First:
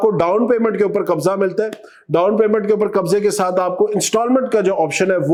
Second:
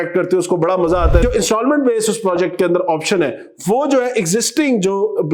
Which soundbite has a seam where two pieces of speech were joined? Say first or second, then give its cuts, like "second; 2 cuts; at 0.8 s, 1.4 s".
second; 1 cut; at 1.2 s